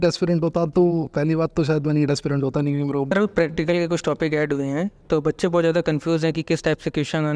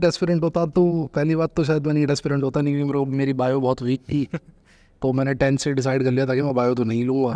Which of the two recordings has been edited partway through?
first; 1 cut; at 3.1 s

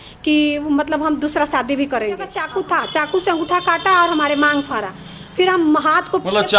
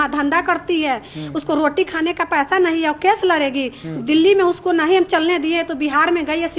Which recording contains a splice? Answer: first; 1 cut; at 2.2 s

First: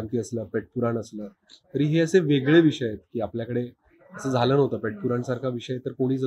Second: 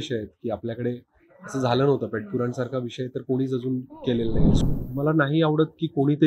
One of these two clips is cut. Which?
second; 1 cut; at 4.6 s

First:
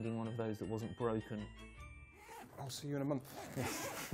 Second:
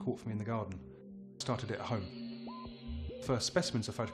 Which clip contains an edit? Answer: second; 1 cut; at 1.4 s

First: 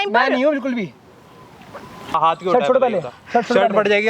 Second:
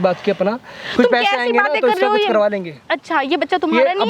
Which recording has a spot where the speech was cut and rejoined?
first; 1 cut; at 2.1 s

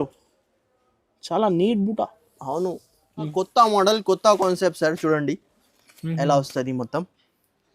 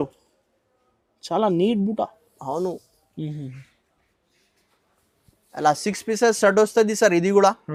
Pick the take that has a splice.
first; 1 cut; at 3.3 s

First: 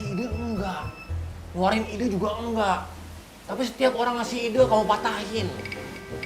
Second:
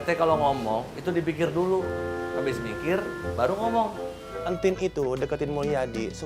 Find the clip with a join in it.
second; 1 cut; at 4.3 s

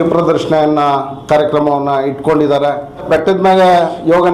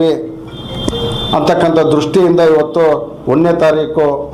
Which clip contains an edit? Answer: first; 1 cut; at 3.1 s

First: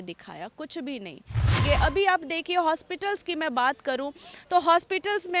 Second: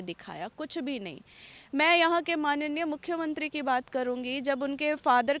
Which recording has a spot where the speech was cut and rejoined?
first; 1 cut; at 1.6 s

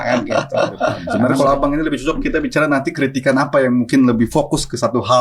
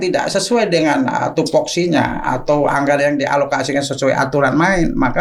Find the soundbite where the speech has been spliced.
first; 1 cut; at 1.1 s

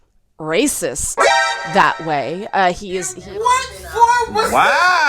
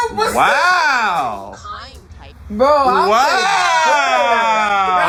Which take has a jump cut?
first; 1 cut; at 3.2 s

